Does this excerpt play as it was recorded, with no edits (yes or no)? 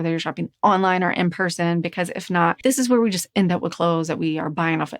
no